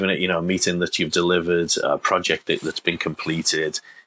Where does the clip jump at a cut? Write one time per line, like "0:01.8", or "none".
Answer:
none